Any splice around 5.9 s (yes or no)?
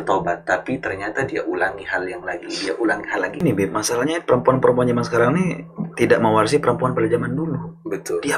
no